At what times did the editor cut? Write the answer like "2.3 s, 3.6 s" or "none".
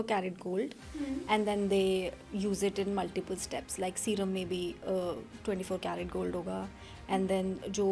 none